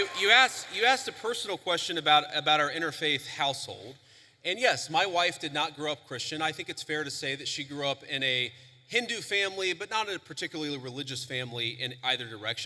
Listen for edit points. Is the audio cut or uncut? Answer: uncut